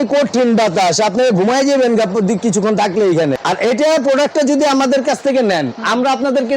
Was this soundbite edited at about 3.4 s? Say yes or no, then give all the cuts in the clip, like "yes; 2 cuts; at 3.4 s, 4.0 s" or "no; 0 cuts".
yes; 1 cut; at 3.4 s